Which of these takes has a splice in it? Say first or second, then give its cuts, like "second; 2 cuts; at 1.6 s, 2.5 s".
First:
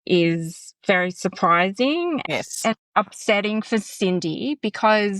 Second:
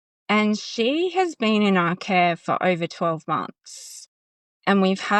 first; 1 cut; at 2.3 s